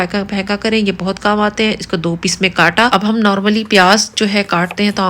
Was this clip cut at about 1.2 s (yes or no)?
no